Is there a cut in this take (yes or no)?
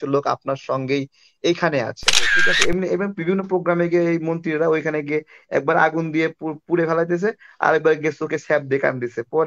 yes